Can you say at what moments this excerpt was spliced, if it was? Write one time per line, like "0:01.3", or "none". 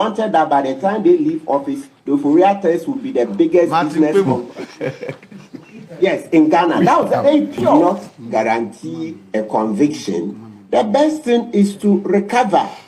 0:07.7